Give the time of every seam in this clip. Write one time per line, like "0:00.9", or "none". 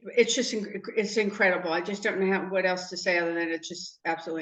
none